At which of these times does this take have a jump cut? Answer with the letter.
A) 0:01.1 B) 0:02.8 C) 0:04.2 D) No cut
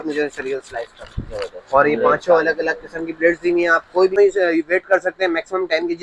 C